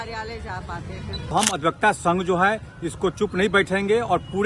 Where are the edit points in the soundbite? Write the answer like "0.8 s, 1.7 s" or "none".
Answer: 1.3 s